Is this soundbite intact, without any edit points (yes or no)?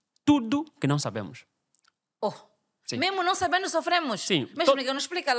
yes